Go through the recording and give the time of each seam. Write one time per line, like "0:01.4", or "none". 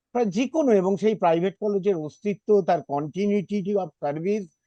none